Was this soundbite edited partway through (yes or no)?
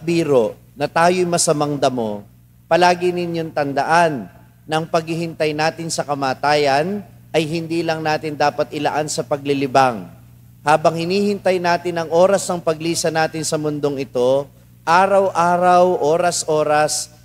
no